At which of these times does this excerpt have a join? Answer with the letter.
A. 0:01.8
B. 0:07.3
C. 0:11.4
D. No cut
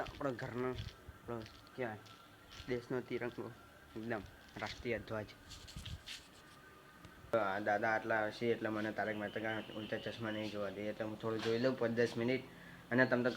B